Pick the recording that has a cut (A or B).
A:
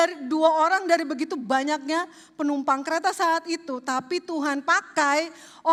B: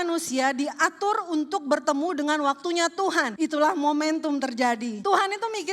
B